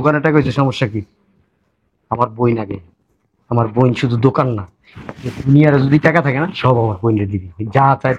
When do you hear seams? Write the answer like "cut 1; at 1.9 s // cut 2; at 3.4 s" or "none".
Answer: none